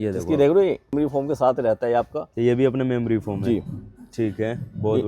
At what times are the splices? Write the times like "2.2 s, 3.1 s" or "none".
0.9 s